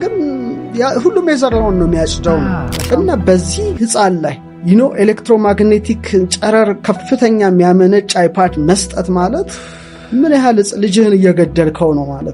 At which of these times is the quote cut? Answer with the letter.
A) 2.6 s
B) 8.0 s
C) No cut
A